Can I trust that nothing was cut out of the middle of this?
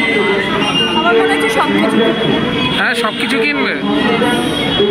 no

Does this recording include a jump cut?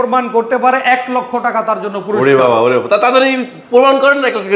no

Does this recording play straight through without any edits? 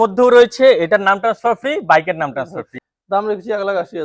no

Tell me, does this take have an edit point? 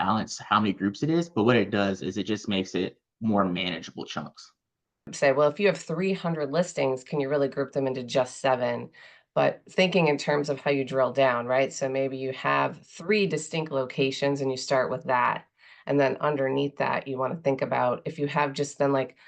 yes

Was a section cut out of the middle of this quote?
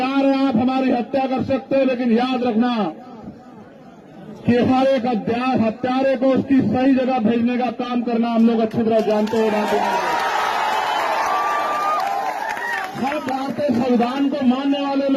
no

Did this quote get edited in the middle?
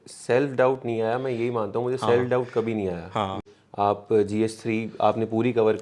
yes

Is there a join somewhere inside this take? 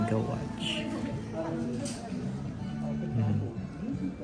no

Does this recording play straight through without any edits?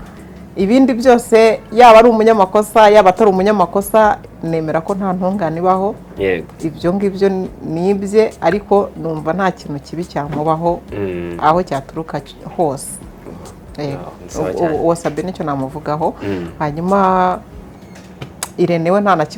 yes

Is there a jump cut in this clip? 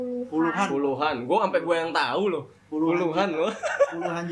no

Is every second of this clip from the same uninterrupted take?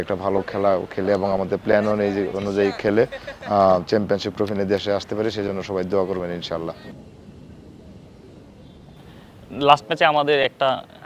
yes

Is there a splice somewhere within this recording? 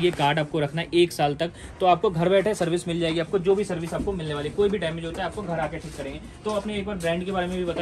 no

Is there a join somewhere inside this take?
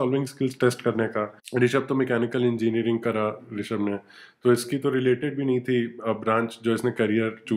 yes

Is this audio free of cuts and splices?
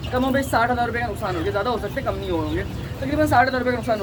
yes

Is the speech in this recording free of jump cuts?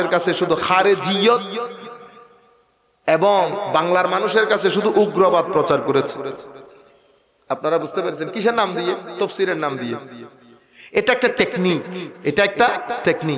yes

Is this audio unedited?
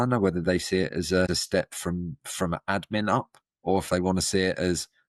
no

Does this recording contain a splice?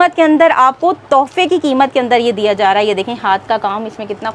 no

